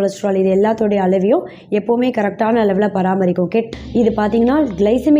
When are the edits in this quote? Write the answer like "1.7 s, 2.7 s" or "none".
3.7 s

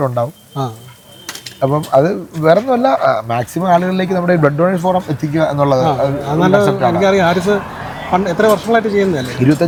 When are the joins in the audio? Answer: none

